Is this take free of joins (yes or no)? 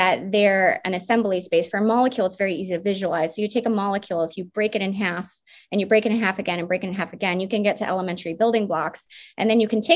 yes